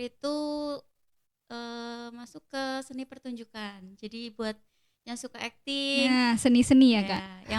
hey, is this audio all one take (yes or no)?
yes